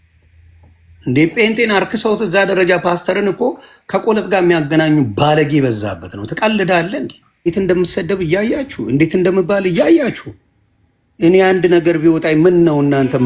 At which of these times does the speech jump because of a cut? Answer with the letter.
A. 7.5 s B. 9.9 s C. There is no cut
A